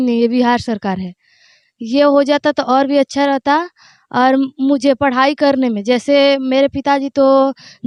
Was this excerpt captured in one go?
yes; 0 cuts

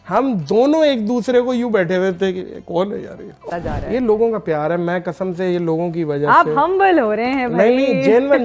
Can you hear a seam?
yes; 1 cut; at 3.5 s

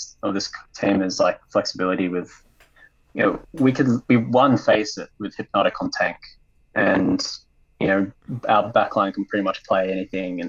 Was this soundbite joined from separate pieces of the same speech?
no; 0 cuts

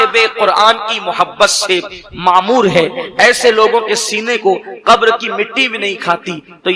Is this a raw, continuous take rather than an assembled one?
yes; 0 cuts

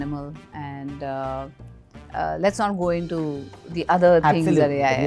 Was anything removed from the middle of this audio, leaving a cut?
no; 0 cuts

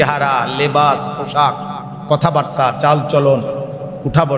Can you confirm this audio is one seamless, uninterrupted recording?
yes; 0 cuts

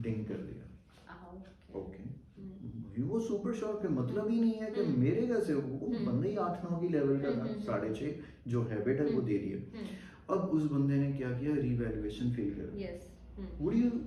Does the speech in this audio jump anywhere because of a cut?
no; 0 cuts

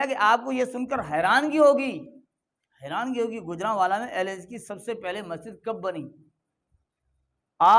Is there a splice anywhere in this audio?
no; 0 cuts

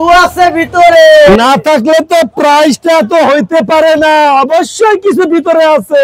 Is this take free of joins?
yes; 0 cuts

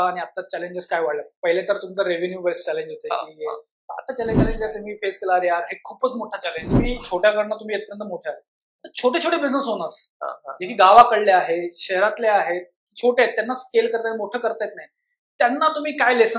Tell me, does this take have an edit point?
yes; 2 cuts; at 4.6 s, 7.0 s

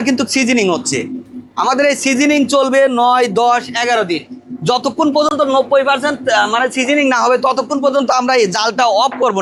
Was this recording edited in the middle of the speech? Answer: no; 0 cuts

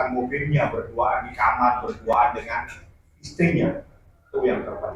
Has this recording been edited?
no; 0 cuts

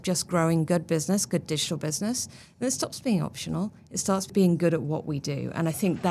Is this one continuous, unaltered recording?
no; 1 cut; at 4.2 s

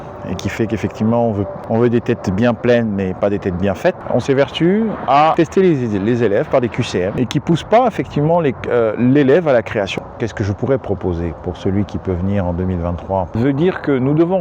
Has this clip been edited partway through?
yes; 6 cuts; at 1.6 s, 4.0 s, 5.3 s, 7.1 s, 9.9 s, 13.3 s

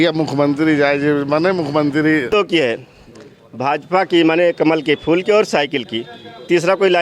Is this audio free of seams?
no; 1 cut; at 2.3 s

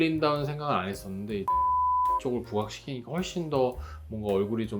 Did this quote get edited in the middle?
no; 0 cuts

